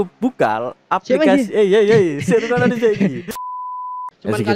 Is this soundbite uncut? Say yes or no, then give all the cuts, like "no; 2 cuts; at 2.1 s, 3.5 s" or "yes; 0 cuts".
no; 1 cut; at 3.5 s